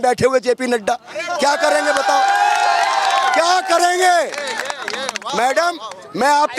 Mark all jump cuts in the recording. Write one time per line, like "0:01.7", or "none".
none

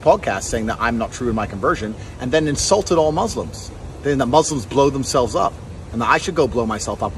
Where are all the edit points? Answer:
none

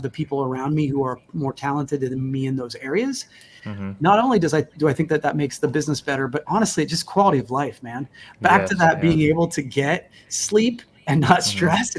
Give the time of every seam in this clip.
none

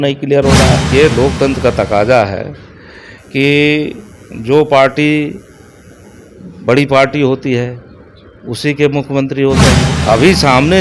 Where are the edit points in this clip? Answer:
0:00.9
0:09.9

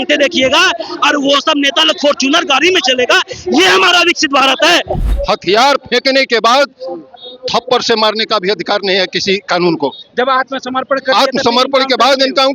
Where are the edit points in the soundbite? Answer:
0:05.0

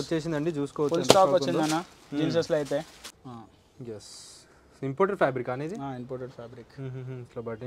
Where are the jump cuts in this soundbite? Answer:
0:03.1

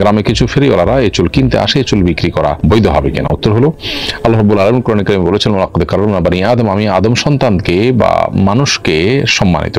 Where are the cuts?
none

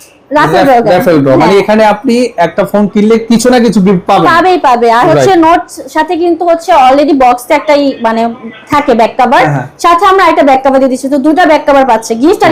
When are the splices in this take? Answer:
none

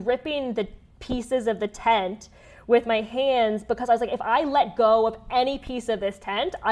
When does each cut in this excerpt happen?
none

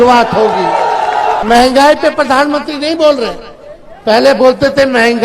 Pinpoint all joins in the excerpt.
0:01.4

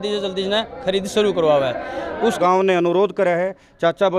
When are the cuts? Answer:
0:02.4

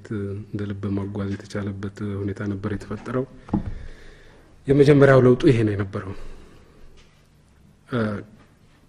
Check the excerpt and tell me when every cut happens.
none

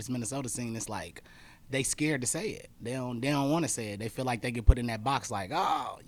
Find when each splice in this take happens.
none

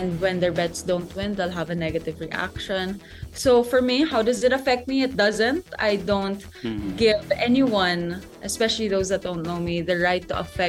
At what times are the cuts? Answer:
none

